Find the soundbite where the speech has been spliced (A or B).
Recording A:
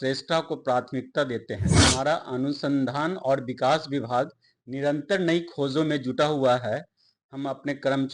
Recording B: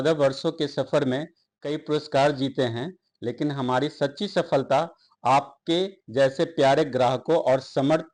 A